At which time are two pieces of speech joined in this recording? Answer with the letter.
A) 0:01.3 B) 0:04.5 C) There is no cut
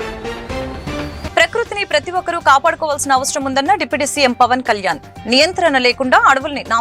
A